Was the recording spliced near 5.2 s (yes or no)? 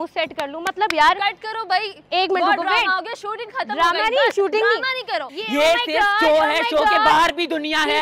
yes